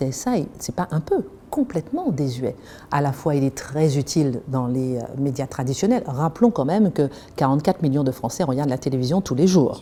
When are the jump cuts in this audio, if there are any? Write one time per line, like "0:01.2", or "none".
none